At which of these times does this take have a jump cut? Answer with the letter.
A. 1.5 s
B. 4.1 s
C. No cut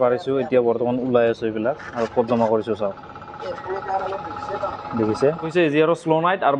C